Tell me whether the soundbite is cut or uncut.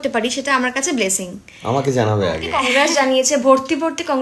cut